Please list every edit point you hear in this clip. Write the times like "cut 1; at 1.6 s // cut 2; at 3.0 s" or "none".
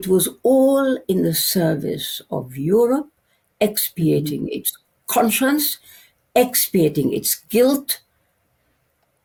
none